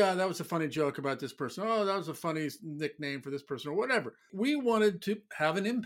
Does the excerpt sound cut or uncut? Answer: uncut